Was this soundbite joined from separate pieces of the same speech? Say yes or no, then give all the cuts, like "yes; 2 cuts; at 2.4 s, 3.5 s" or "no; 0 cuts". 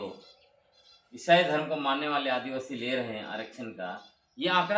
no; 0 cuts